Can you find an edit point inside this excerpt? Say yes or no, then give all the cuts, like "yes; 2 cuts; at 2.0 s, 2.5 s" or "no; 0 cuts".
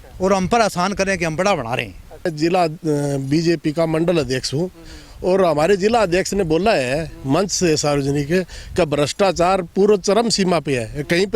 yes; 1 cut; at 2.3 s